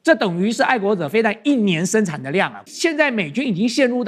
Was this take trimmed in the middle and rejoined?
yes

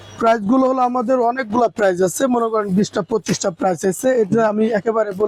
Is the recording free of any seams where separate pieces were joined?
yes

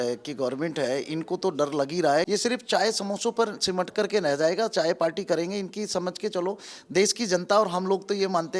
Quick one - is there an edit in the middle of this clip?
yes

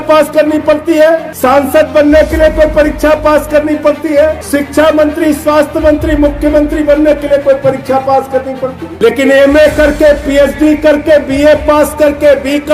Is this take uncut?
no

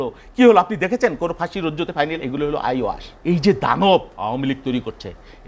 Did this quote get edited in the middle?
yes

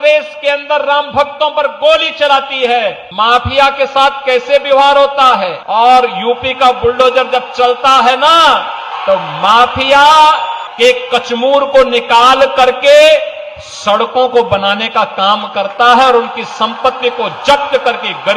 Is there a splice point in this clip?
yes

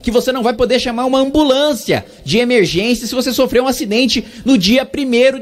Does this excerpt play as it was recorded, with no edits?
yes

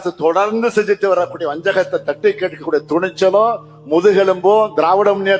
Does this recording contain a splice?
no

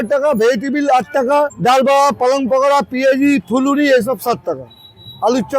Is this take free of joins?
no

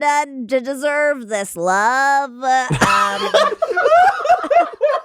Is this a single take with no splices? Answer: yes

